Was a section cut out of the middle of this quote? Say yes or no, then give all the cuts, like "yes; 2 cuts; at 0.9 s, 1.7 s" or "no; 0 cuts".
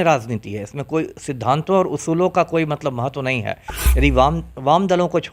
no; 0 cuts